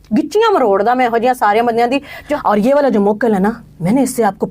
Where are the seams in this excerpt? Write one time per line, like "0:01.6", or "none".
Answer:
0:02.2